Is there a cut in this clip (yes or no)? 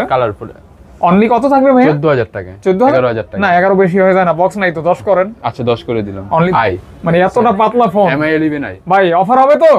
yes